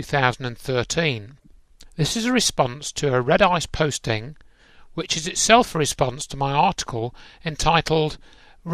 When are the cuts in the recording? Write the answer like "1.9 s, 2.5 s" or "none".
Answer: none